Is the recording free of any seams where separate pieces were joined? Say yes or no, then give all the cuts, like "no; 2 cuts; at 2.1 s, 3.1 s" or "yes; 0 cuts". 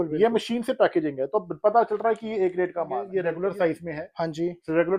no; 1 cut; at 3.1 s